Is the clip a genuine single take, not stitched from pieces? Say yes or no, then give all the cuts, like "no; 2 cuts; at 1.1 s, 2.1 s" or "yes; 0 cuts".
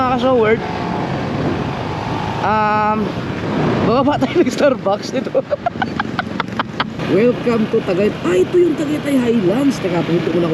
no; 1 cut; at 7.0 s